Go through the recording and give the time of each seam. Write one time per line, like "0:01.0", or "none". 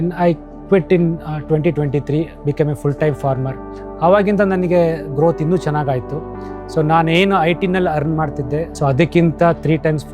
0:08.7